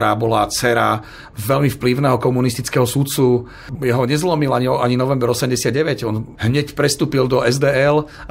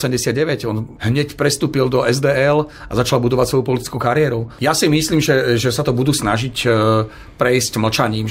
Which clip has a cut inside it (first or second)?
second